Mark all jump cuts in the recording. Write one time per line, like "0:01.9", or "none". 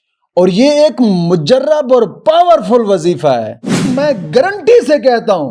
0:03.8